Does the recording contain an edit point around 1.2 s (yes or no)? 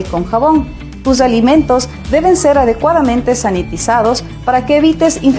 no